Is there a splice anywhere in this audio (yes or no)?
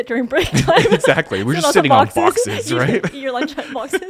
no